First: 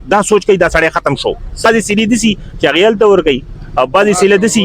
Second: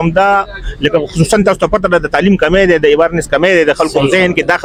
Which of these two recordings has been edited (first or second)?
first